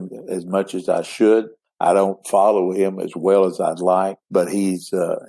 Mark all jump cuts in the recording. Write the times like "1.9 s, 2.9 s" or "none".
1.6 s, 4.2 s